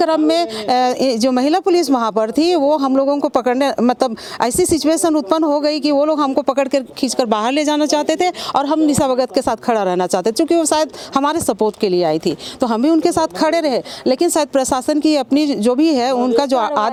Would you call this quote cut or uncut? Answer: uncut